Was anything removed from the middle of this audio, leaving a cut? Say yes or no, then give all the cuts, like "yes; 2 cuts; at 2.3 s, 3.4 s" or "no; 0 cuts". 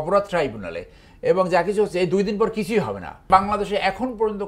yes; 1 cut; at 3.2 s